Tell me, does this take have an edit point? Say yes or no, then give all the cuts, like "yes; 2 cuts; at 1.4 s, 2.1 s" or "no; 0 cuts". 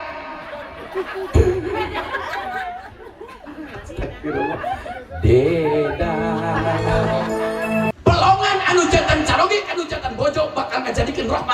yes; 1 cut; at 7.9 s